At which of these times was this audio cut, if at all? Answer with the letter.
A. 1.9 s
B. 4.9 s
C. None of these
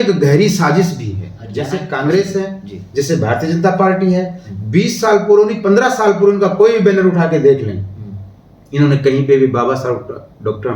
A